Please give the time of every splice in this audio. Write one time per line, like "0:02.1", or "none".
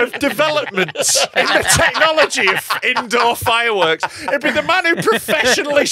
0:01.3

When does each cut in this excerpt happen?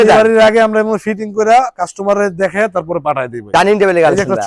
0:03.4

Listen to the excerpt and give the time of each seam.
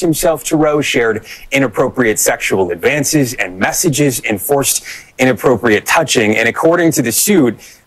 0:03.4

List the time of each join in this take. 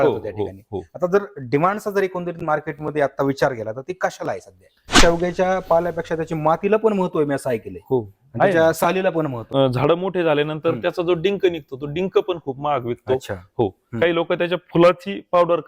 0:04.9
0:09.4

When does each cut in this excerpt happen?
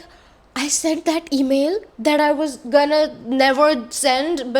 none

